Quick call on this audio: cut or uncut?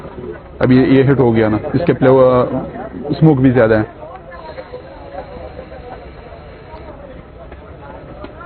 uncut